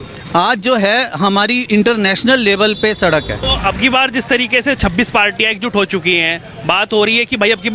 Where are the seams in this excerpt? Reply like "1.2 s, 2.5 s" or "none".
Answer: 3.4 s